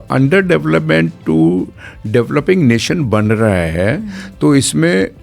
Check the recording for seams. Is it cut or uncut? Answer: uncut